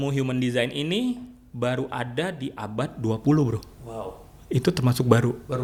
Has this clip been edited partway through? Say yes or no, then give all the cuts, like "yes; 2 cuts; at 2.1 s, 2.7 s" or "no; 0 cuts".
no; 0 cuts